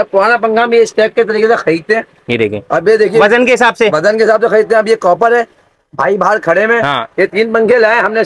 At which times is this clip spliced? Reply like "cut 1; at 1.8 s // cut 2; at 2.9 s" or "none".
none